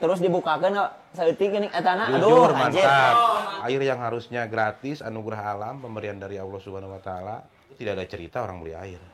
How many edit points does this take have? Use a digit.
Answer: 2